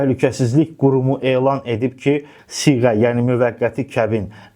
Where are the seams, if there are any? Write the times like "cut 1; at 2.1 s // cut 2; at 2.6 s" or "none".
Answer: cut 1; at 2.3 s

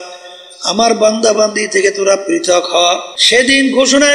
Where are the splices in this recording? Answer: cut 1; at 3.1 s

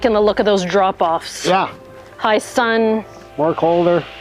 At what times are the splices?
cut 1; at 3.2 s

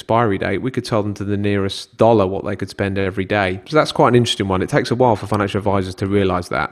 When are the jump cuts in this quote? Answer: cut 1; at 1.8 s // cut 2; at 3.6 s

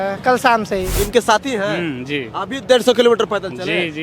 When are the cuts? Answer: cut 1; at 1.0 s

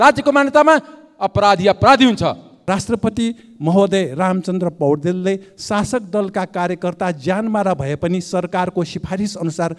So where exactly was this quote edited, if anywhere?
cut 1; at 2.5 s

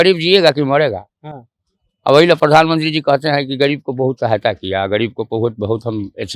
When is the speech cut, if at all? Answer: none

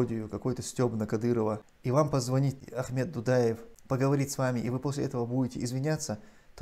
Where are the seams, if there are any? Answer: cut 1; at 1.7 s // cut 2; at 2.6 s // cut 3; at 3.7 s

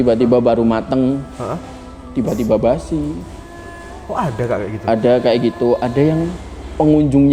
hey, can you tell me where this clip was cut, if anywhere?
none

